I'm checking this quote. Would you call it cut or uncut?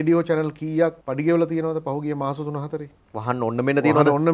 cut